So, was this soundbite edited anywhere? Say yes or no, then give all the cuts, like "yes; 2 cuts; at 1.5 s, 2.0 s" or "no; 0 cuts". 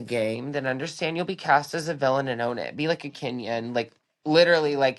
no; 0 cuts